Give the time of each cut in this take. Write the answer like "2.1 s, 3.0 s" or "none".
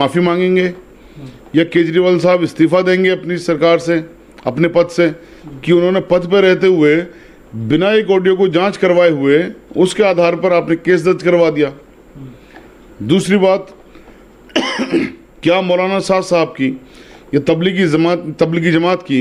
none